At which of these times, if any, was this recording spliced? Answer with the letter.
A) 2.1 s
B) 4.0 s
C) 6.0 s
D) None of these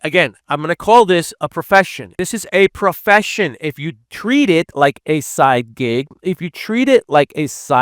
A